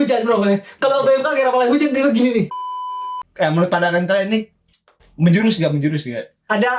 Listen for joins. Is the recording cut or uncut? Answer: cut